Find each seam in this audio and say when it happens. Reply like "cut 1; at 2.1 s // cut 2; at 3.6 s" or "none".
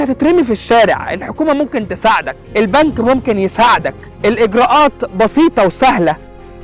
none

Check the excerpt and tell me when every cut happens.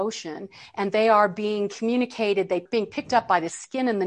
cut 1; at 2.7 s

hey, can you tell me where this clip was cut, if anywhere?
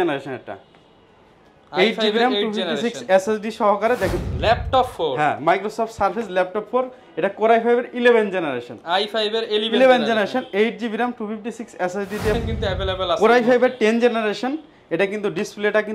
cut 1; at 4.2 s // cut 2; at 12.3 s

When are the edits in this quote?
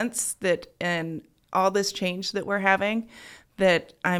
none

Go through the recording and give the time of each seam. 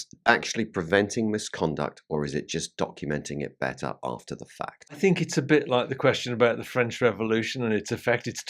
cut 1; at 5.0 s

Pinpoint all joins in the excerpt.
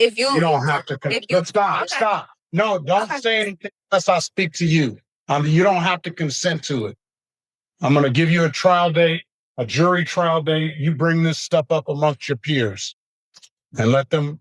none

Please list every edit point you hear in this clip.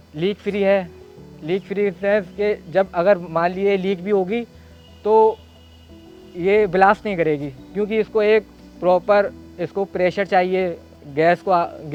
none

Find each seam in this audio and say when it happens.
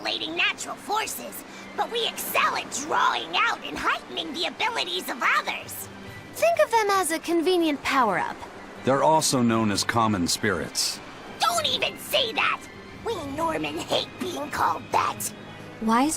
cut 1; at 14.1 s

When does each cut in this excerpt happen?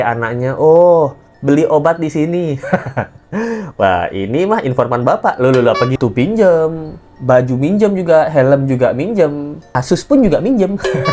cut 1; at 5.9 s

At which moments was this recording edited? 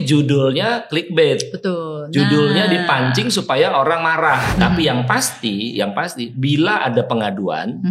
cut 1; at 4.6 s

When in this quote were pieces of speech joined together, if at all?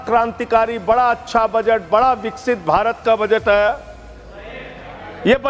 none

